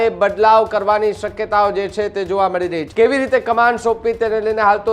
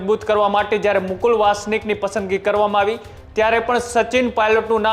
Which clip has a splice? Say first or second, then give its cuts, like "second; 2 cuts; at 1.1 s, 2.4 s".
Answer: first; 1 cut; at 2.8 s